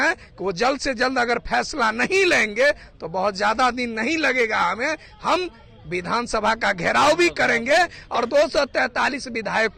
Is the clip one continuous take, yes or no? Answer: yes